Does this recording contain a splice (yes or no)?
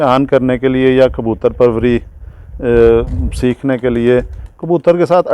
no